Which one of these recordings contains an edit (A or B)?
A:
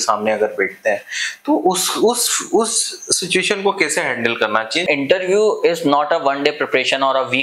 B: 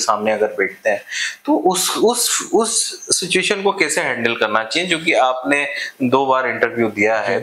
A